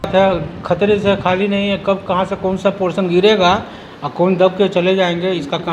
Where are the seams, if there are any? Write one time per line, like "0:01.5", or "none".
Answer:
none